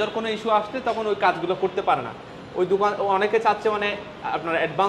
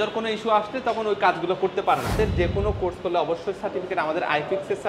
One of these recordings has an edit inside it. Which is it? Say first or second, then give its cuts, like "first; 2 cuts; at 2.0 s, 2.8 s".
second; 1 cut; at 2.2 s